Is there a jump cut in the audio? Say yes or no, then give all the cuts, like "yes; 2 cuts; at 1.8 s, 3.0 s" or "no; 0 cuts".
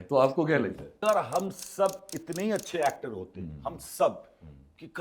yes; 1 cut; at 1.0 s